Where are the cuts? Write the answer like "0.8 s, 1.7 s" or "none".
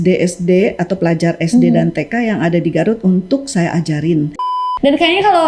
4.5 s